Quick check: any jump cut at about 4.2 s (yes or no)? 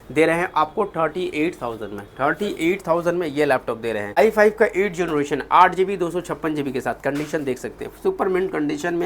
yes